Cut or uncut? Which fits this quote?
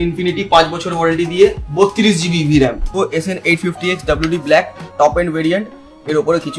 cut